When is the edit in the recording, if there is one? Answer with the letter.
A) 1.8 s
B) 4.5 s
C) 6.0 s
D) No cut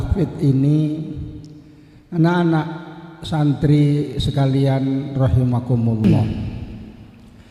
C